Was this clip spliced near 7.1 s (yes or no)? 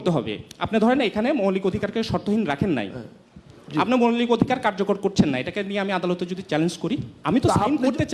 yes